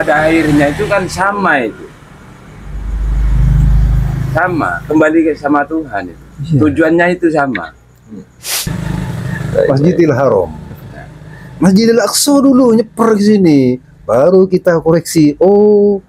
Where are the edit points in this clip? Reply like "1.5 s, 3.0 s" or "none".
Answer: 8.7 s